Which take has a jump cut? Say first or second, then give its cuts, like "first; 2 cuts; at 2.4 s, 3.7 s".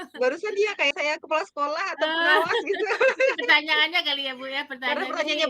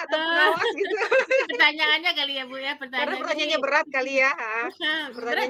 first; 1 cut; at 0.9 s